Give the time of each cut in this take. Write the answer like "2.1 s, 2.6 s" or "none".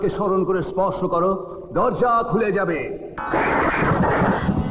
3.1 s